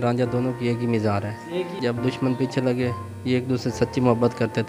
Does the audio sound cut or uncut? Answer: cut